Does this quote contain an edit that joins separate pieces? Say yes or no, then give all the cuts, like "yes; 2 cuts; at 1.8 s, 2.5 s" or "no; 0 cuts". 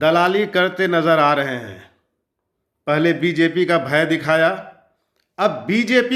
no; 0 cuts